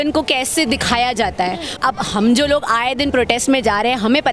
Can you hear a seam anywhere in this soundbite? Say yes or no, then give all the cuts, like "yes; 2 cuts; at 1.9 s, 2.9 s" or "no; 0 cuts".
yes; 1 cut; at 1.8 s